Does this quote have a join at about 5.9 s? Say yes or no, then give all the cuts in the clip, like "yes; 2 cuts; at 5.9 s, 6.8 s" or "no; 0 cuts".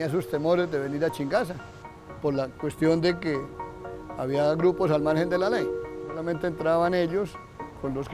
yes; 1 cut; at 5.9 s